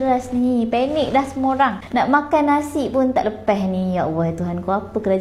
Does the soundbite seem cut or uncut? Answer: uncut